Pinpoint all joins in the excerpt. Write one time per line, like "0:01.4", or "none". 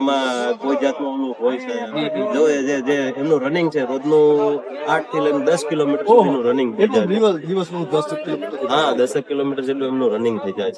none

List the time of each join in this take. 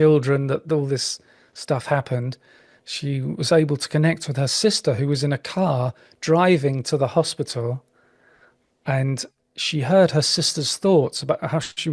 none

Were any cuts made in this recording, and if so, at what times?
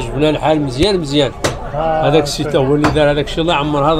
none

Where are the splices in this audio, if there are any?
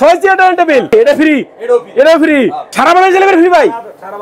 0:00.9
0:02.6

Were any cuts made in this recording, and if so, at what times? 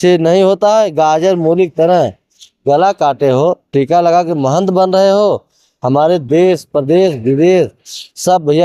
none

